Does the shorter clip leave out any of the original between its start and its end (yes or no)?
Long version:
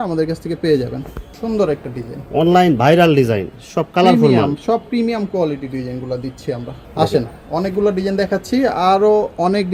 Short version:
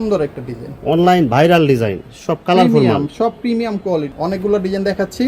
yes